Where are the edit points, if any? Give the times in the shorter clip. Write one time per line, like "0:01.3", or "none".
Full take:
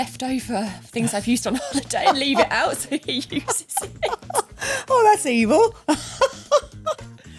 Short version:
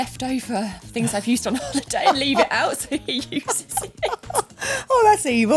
none